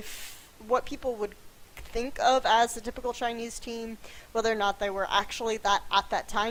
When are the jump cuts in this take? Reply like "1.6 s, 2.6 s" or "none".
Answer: none